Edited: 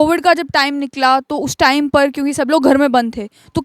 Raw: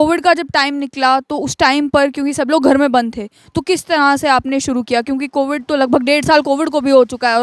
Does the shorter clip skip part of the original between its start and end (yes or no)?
no